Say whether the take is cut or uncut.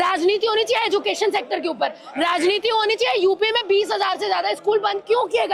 uncut